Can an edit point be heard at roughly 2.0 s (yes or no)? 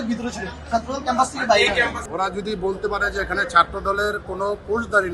yes